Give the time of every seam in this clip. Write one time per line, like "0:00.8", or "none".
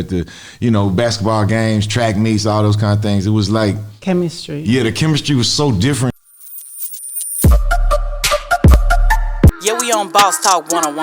0:06.1